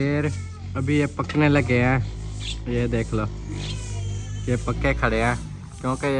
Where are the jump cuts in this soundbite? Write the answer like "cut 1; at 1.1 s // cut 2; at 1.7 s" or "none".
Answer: none